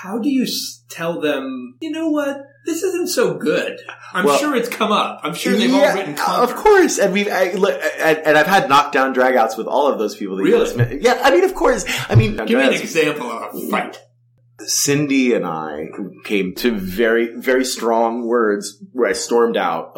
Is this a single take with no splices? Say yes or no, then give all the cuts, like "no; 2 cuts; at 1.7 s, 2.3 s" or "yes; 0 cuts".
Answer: no; 3 cuts; at 1.7 s, 12.4 s, 14.3 s